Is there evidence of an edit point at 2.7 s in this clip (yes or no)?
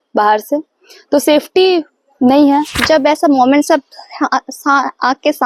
yes